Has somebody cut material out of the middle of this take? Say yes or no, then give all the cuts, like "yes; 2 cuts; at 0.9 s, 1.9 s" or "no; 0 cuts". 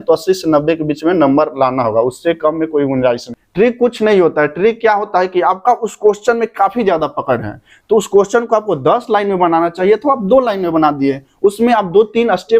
yes; 1 cut; at 3.4 s